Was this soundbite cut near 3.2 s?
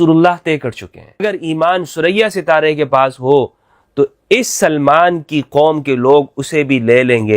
no; 1 cut; at 1.2 s

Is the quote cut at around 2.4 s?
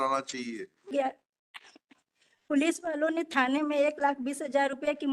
no; 1 cut; at 0.9 s

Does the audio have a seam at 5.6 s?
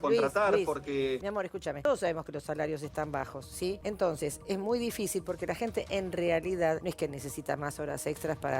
no; 3 cuts; at 1.5 s, 3.8 s, 6.8 s

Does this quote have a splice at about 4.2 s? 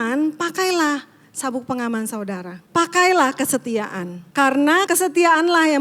yes; 3 cuts; at 2.6 s, 4.2 s, 4.9 s

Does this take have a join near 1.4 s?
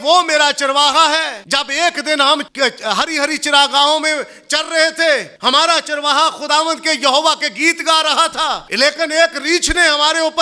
yes; 4 cuts; at 1.4 s, 2.5 s, 5.3 s, 8.7 s

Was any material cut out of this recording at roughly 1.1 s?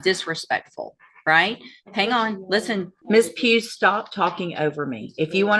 no; 1 cut; at 2.9 s

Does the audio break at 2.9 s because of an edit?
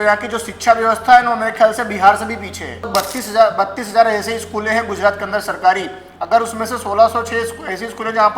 yes; 1 cut; at 2.9 s

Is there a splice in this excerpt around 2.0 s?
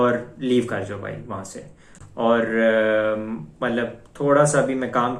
no; 0 cuts

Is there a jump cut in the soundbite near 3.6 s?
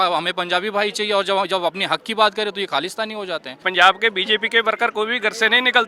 yes; 1 cut; at 3.6 s

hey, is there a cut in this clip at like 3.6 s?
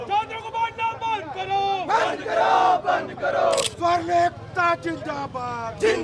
yes; 1 cut; at 3.6 s

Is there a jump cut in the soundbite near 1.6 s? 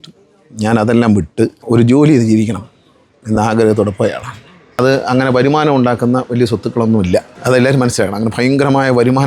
yes; 2 cuts; at 1.6 s, 4.6 s

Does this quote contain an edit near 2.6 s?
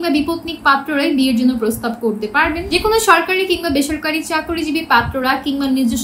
yes; 1 cut; at 2.6 s

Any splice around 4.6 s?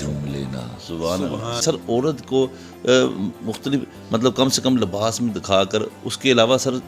no; 1 cut; at 1.6 s

